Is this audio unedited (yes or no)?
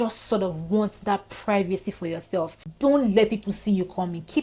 no